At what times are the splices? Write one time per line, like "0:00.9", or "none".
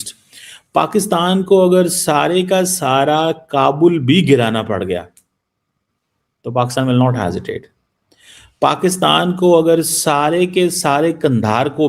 none